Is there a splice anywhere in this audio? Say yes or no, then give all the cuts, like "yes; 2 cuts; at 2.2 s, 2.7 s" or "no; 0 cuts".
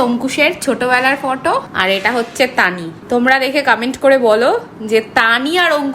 yes; 2 cuts; at 1.7 s, 2.9 s